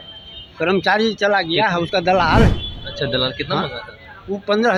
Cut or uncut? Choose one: uncut